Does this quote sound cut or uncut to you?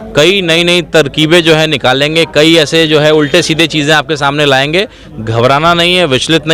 uncut